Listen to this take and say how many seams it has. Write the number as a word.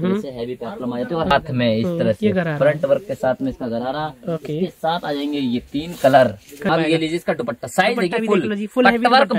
two